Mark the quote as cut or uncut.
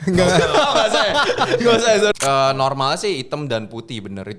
cut